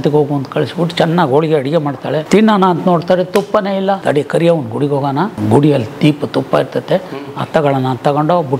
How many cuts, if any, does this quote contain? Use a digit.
3